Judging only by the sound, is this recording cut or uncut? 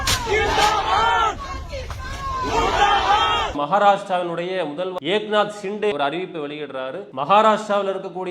cut